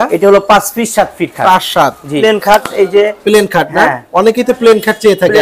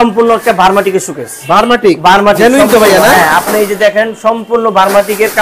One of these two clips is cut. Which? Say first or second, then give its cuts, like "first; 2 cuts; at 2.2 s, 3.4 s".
first; 1 cut; at 2.2 s